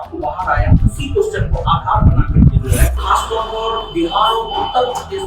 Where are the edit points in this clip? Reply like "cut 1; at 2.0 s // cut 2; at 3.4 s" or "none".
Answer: cut 1; at 2.9 s